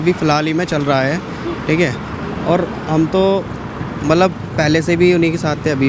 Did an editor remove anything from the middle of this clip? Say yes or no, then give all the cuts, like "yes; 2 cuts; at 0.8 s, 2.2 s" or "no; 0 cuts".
no; 0 cuts